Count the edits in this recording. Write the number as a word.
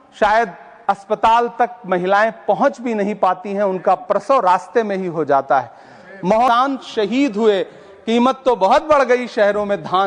one